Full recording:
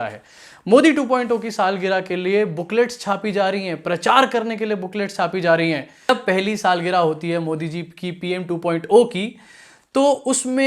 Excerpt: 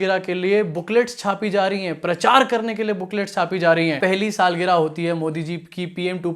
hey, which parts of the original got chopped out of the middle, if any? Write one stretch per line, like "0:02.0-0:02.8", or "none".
0:05.8-0:06.2